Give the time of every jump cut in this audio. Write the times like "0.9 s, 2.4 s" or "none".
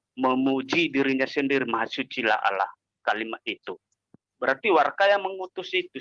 4.2 s